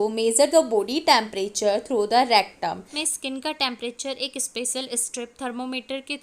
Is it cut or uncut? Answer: cut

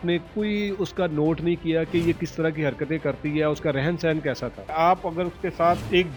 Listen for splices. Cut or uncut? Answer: uncut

